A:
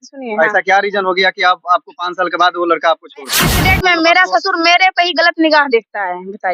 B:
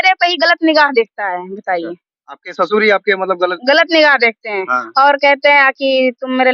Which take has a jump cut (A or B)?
A